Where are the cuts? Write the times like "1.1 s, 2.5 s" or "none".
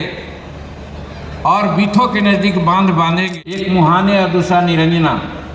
3.5 s